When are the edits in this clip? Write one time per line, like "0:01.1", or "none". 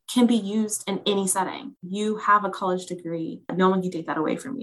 0:01.7
0:03.5